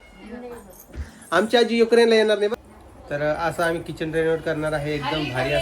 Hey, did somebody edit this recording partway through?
yes; 1 cut; at 2.5 s

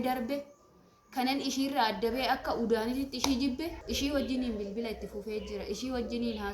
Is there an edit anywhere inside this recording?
yes; 1 cut; at 3.8 s

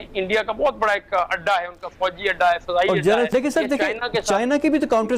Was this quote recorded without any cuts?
no; 1 cut; at 3.3 s

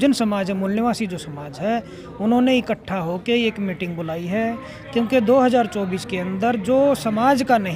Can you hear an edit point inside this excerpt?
no; 0 cuts

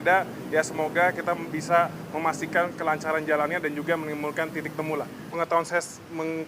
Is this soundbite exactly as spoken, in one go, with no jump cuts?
no; 1 cut; at 5.2 s

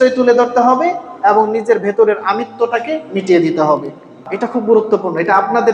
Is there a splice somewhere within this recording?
yes; 1 cut; at 4.3 s

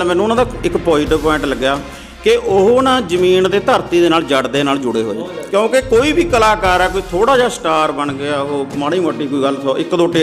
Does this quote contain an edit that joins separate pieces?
yes; 1 cut; at 5.3 s

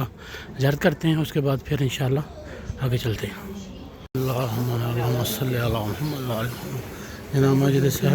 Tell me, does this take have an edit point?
yes; 1 cut; at 3.9 s

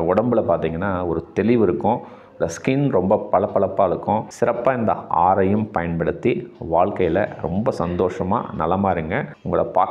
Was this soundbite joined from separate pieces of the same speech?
yes; 1 cut; at 4.3 s

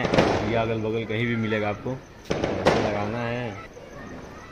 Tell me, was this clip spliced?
yes; 1 cut; at 3.6 s

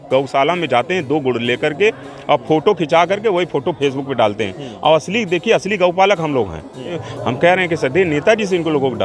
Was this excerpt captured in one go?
no; 1 cut; at 7.0 s

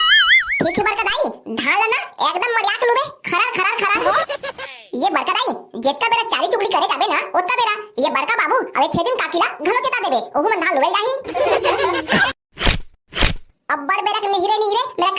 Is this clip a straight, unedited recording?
no; 2 cuts; at 4.6 s, 12.2 s

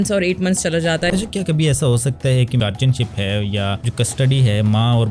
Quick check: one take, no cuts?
no; 3 cuts; at 1.1 s, 2.6 s, 3.8 s

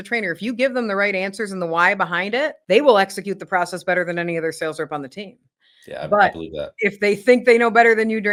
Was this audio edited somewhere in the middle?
no; 0 cuts

